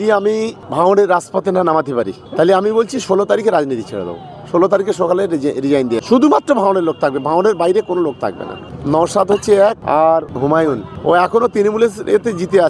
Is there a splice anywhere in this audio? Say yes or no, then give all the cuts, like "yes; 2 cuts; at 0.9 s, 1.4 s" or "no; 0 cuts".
yes; 3 cuts; at 6.0 s, 8.7 s, 10.3 s